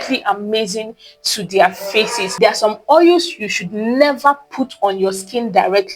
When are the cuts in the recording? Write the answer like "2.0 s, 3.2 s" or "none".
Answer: 2.3 s